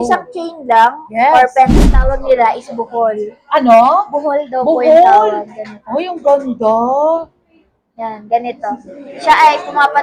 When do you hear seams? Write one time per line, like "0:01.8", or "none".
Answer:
0:01.8